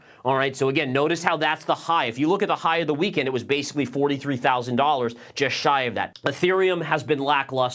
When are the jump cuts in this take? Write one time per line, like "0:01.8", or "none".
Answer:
0:06.0

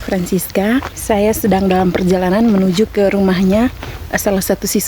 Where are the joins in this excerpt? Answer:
0:00.9

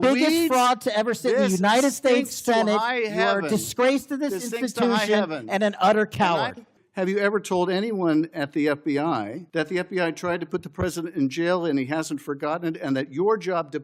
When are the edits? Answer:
0:06.8
0:09.4

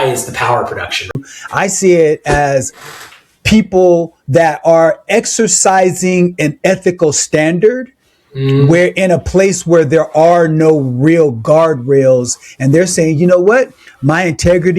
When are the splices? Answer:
0:01.2

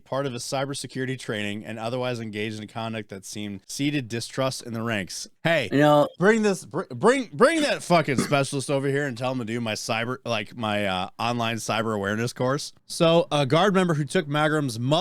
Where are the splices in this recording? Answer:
0:03.6
0:05.2
0:12.8

